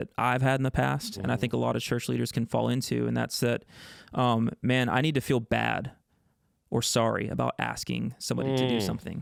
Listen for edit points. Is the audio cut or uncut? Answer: uncut